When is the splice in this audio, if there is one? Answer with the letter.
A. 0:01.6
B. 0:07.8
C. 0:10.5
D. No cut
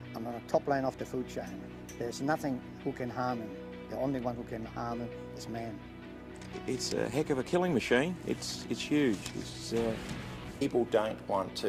D